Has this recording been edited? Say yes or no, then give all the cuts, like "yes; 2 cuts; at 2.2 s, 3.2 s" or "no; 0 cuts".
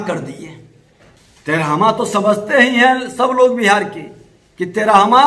no; 0 cuts